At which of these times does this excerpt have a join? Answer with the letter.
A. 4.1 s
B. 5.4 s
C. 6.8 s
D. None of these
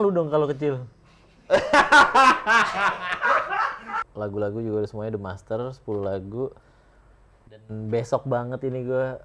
A